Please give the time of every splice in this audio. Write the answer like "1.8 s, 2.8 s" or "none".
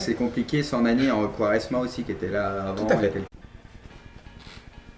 none